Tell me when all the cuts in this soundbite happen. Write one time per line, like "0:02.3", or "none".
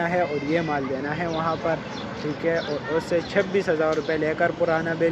none